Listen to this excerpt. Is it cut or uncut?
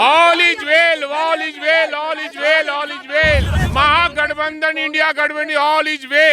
cut